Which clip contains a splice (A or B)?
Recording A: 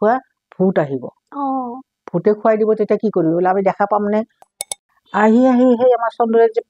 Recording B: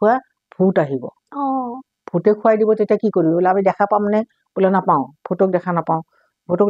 A